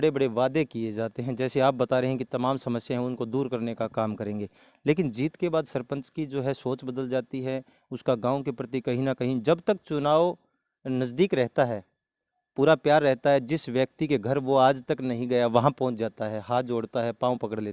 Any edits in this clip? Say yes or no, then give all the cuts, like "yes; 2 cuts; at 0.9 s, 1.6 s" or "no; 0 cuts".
no; 0 cuts